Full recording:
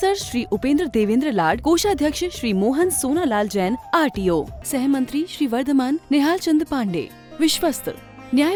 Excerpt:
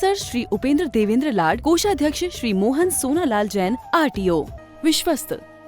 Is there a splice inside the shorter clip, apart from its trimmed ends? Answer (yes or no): yes